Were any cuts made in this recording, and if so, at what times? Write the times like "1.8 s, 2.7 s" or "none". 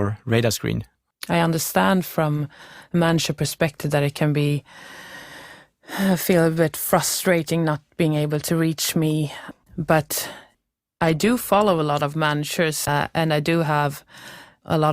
0.9 s, 9.4 s, 12.9 s